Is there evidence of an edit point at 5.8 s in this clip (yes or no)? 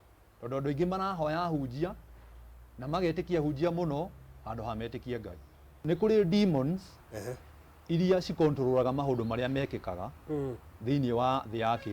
yes